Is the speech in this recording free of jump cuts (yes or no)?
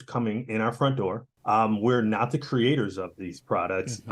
no